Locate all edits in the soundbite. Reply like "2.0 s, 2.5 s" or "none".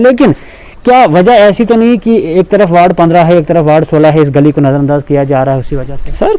none